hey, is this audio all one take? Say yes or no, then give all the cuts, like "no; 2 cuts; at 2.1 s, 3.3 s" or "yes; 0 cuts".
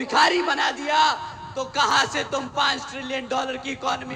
yes; 0 cuts